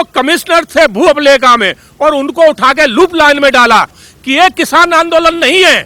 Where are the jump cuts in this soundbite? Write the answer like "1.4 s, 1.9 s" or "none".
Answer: 4.0 s